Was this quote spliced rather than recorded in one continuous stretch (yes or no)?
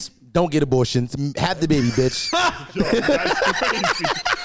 no